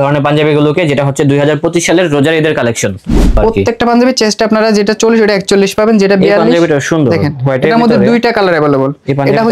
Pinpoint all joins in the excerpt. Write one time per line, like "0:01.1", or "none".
0:03.4